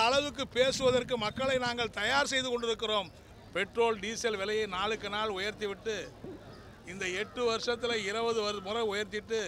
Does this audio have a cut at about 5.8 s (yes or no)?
no